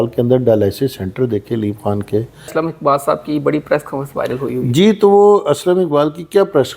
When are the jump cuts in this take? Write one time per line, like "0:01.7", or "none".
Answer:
0:02.5